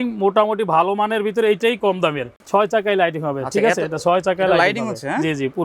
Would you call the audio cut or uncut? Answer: cut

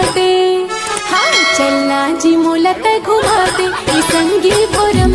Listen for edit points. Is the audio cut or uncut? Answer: uncut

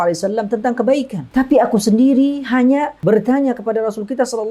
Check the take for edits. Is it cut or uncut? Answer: cut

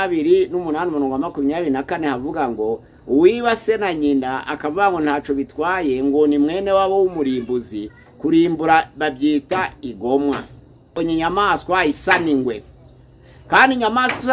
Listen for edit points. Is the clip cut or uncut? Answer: cut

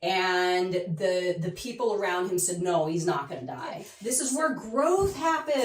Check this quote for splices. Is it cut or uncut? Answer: cut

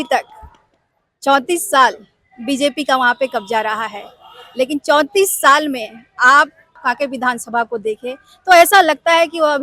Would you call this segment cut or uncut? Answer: cut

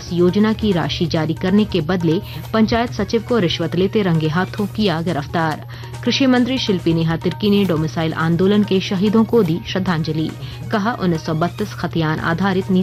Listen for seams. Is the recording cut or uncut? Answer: uncut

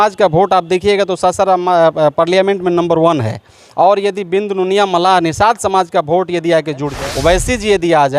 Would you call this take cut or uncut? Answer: cut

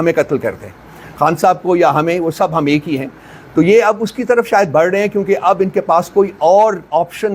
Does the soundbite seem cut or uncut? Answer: uncut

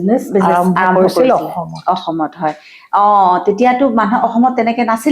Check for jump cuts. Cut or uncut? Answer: uncut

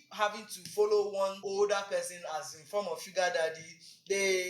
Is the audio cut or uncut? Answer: cut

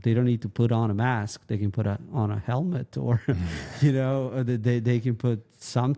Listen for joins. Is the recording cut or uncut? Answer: uncut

